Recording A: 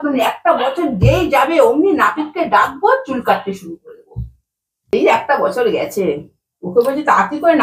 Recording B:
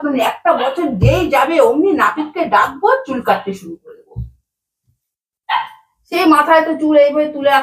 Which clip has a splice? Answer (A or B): A